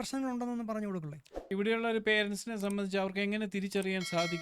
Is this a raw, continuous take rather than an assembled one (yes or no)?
no